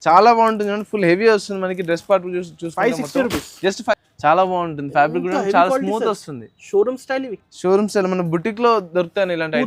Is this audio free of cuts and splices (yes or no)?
no